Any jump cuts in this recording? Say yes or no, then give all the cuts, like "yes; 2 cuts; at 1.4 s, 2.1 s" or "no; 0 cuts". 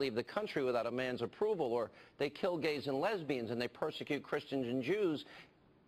no; 0 cuts